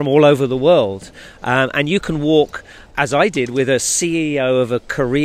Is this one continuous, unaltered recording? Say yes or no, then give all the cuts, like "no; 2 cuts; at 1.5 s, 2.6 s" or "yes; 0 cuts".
yes; 0 cuts